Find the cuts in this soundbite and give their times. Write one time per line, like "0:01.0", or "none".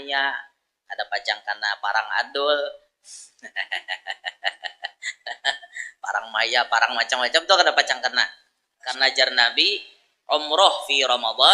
0:08.9